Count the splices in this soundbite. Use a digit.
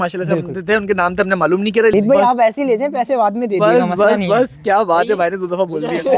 1